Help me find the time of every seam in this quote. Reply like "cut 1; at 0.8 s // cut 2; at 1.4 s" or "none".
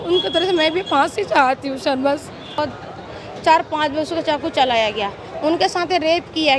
cut 1; at 2.6 s